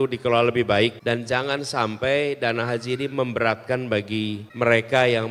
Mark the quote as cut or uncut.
cut